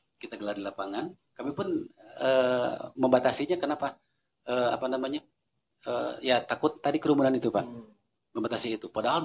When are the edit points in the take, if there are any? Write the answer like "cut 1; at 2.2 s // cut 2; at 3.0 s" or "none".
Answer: none